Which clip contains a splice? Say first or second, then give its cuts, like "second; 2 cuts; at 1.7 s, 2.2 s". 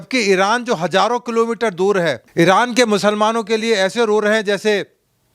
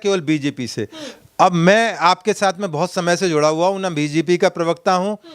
first; 1 cut; at 2.2 s